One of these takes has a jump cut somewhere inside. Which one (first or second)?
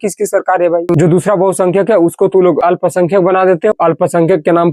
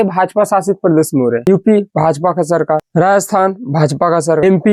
first